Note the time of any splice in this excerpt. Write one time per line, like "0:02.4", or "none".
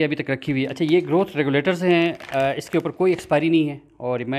none